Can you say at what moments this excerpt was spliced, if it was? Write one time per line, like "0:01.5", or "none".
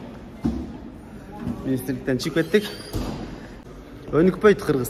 0:03.6

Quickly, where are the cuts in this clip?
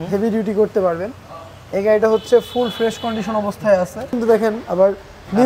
0:04.2

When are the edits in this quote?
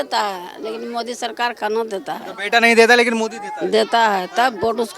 none

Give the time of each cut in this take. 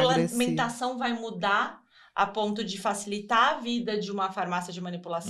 none

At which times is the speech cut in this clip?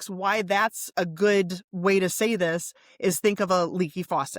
0:00.9

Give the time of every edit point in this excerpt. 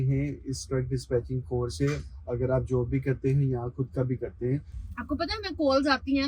0:04.7

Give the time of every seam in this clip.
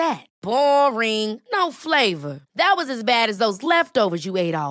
none

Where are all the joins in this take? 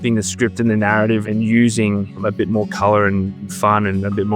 0:01.3
0:02.2
0:03.4

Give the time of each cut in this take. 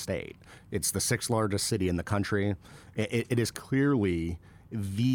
none

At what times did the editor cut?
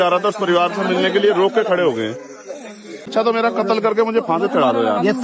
0:03.1

